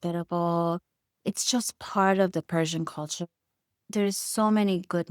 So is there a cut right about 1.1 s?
yes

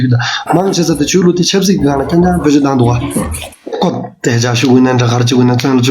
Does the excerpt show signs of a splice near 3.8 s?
yes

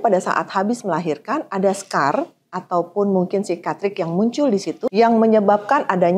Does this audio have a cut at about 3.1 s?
no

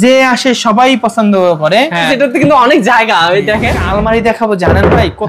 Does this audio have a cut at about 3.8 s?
yes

